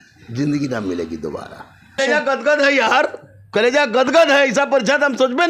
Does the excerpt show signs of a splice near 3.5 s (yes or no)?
no